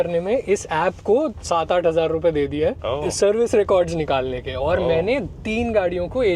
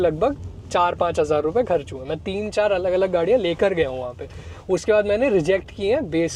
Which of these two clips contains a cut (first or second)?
first